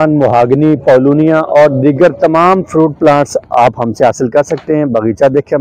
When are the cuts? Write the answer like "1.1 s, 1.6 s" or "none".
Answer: none